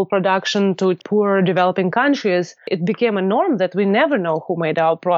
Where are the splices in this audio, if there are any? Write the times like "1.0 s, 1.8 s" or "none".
1.0 s, 2.7 s